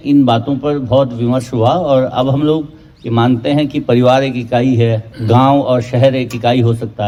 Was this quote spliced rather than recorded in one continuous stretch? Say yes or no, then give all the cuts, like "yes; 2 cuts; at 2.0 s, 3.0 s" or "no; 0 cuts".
no; 0 cuts